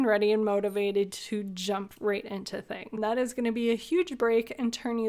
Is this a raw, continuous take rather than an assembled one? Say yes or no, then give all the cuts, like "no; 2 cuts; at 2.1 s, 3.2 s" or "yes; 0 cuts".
no; 1 cut; at 3.0 s